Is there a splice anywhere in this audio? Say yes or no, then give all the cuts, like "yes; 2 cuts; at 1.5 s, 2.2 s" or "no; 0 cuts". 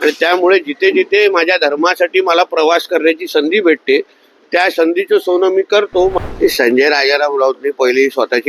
yes; 1 cut; at 6.2 s